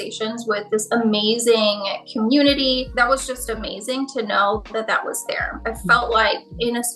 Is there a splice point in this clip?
yes; 2 cuts; at 2.9 s, 5.6 s

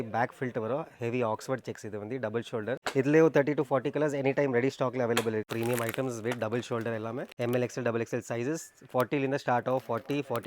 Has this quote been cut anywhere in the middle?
yes; 3 cuts; at 2.8 s, 5.5 s, 7.3 s

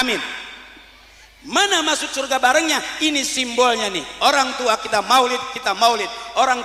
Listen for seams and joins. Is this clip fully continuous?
yes; 0 cuts

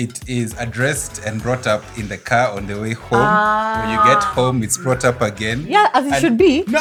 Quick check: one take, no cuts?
yes; 0 cuts

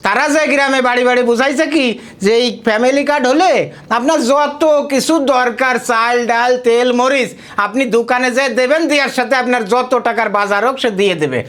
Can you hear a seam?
no; 0 cuts

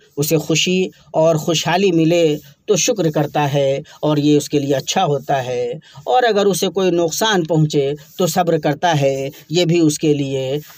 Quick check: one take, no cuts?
yes; 0 cuts

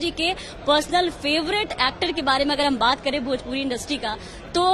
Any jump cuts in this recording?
no; 0 cuts

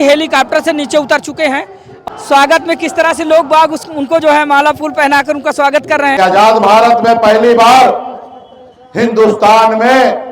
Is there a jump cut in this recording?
yes; 2 cuts; at 1.8 s, 6.2 s

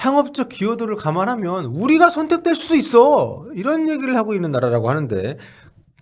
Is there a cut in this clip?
no; 0 cuts

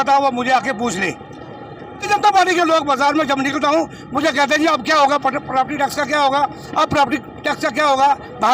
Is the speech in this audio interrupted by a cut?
yes; 1 cut; at 2.0 s

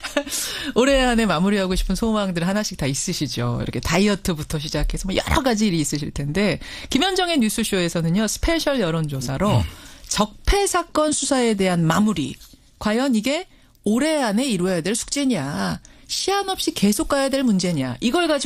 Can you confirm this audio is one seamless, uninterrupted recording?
yes; 0 cuts

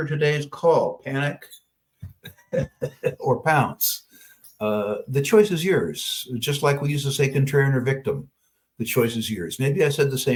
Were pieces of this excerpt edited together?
no; 0 cuts

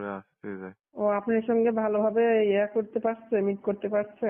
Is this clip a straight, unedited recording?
no; 1 cut; at 1.0 s

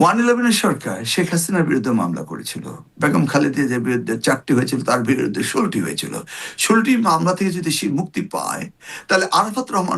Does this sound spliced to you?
no; 0 cuts

